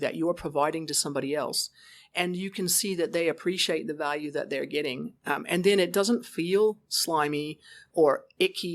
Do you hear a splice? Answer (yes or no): no